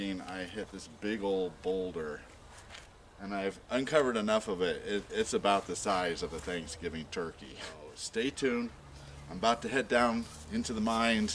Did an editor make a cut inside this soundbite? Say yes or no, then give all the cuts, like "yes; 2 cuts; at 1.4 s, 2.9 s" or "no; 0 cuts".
yes; 1 cut; at 7.9 s